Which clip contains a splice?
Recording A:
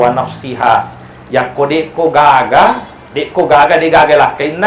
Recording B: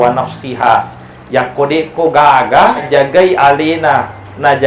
B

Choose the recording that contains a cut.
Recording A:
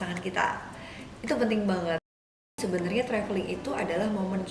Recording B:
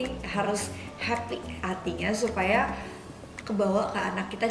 A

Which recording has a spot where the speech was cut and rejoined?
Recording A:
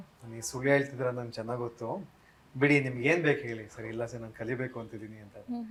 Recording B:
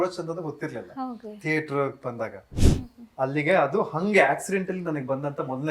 B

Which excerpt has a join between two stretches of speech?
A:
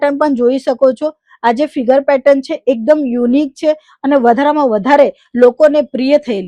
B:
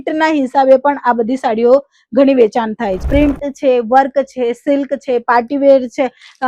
B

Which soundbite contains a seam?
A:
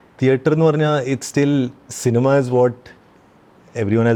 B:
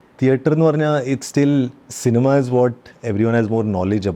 B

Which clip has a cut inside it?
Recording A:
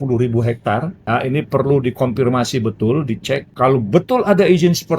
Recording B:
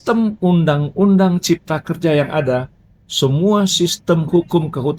A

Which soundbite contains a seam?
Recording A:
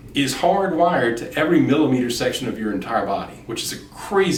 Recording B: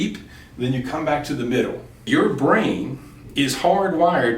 B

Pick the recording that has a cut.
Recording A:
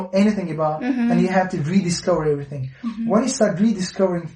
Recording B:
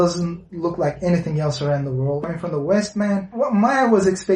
B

